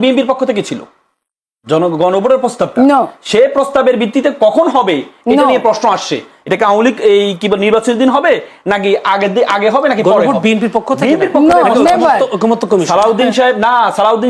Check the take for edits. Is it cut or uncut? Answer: uncut